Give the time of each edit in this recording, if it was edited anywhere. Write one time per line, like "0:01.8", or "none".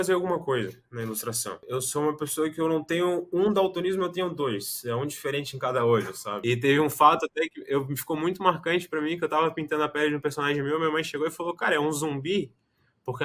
0:01.6
0:06.2